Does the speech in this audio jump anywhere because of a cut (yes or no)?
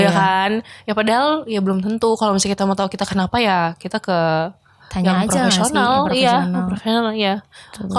no